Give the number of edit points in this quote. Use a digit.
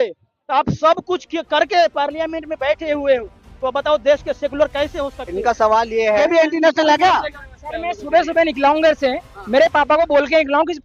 1